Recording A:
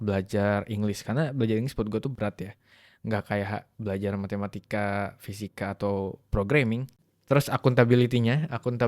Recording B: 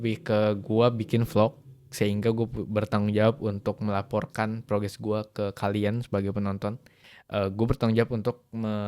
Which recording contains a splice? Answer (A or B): A